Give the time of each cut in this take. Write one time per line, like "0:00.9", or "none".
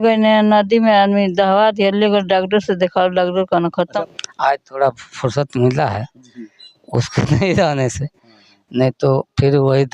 0:04.1